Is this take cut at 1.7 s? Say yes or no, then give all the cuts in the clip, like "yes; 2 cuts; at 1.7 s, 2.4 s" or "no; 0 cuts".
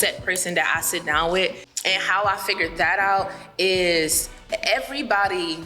yes; 1 cut; at 1.7 s